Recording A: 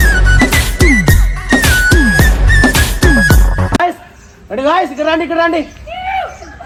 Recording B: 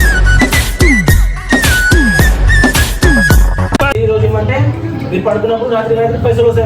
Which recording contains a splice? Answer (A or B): B